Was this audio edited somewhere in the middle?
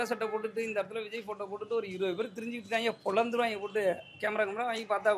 no; 0 cuts

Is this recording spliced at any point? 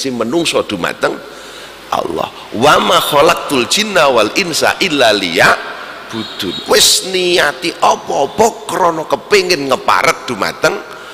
no; 0 cuts

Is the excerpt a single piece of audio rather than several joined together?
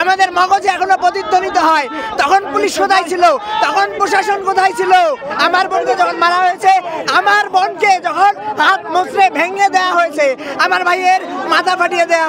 yes; 0 cuts

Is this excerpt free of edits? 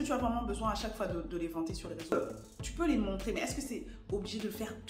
no; 1 cut; at 2.1 s

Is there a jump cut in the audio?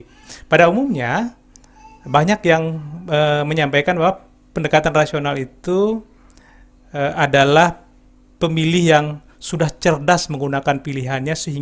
no; 0 cuts

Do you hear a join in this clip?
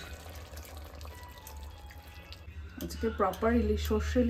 yes; 1 cut; at 2.5 s

